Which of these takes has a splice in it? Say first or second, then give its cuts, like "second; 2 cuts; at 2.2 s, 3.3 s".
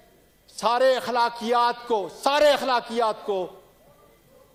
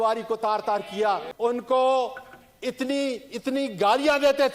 second; 1 cut; at 1.3 s